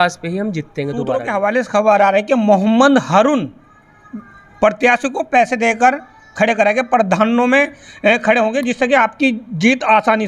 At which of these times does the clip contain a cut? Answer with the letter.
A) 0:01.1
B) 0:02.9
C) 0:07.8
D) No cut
A